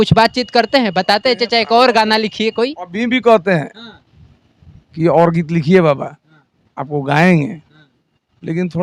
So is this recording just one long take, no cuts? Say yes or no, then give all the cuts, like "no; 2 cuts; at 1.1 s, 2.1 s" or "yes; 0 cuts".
yes; 0 cuts